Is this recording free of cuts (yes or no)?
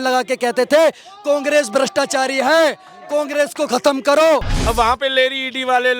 no